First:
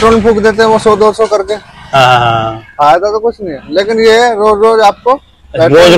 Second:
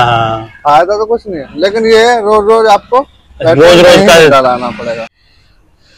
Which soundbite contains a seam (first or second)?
second